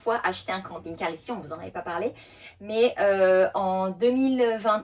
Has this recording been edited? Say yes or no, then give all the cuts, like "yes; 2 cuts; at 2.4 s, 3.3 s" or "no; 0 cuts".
no; 0 cuts